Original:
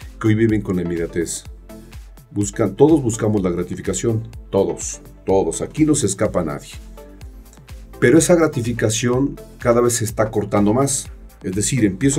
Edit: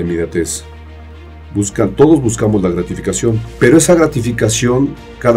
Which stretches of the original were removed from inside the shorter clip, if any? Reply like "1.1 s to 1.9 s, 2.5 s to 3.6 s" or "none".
4.3 s to 7.9 s